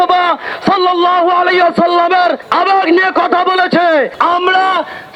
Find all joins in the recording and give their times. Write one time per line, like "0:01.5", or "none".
0:02.4
0:04.1